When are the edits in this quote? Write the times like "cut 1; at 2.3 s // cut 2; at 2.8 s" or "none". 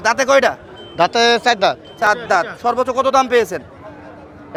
none